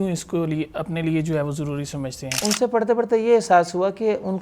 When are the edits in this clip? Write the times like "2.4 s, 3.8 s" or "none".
2.4 s